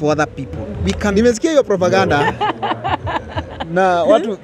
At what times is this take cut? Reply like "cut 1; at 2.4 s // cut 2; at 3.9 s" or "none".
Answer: cut 1; at 1.1 s